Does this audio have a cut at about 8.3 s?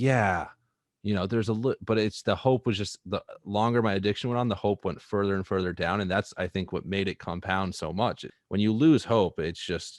yes; 1 cut; at 8.3 s

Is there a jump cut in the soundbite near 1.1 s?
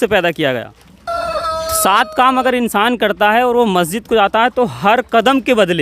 yes; 1 cut; at 1.1 s

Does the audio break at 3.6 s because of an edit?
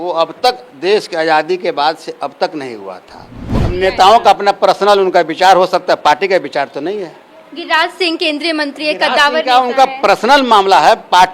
yes; 1 cut; at 3.6 s

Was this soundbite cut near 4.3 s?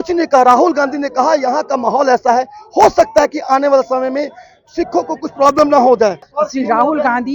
no; 1 cut; at 6.3 s

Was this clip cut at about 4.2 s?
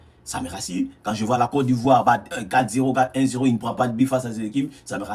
no; 0 cuts

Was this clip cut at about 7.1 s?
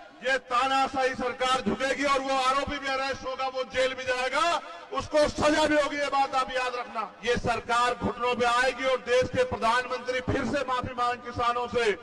yes; 1 cut; at 7.1 s

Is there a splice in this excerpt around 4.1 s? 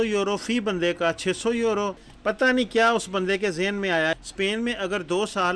yes; 1 cut; at 4.1 s

